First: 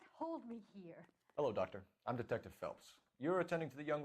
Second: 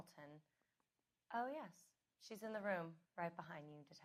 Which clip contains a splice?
first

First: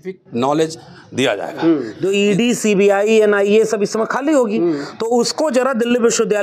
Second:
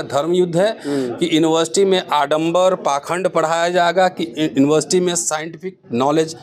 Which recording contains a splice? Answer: first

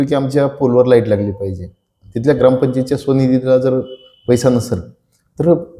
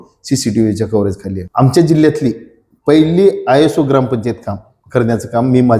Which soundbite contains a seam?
second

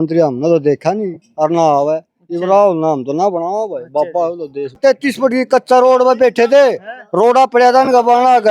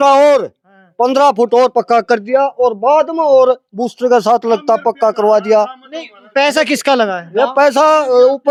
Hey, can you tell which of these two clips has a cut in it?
first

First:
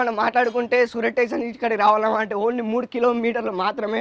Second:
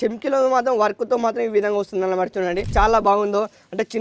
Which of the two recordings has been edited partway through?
second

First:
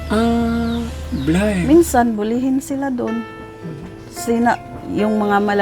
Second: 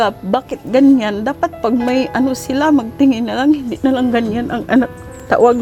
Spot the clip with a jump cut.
first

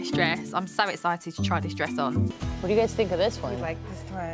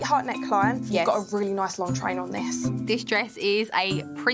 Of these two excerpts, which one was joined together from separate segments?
first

